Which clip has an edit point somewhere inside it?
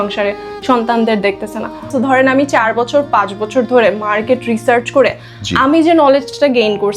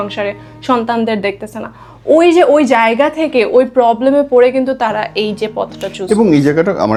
first; 1 cut; at 1.9 s

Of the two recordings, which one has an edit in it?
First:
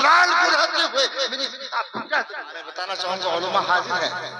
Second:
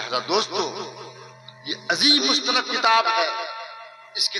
first; 1 cut; at 2.7 s

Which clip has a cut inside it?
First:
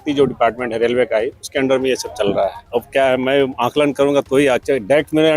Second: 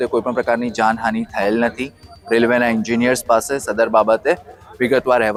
first; 1 cut; at 2.6 s

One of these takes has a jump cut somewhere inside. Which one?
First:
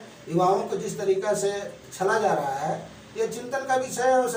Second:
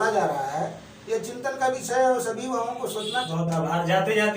second; 1 cut; at 3.3 s

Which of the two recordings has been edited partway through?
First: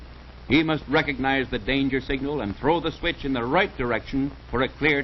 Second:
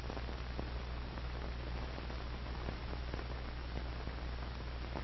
first; 1 cut; at 2.1 s

